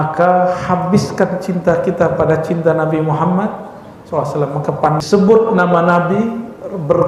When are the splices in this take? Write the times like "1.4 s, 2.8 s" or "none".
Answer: 5.0 s